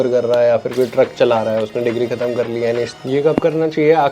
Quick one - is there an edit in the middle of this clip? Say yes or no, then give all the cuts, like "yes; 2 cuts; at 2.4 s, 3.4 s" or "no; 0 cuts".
yes; 1 cut; at 2.9 s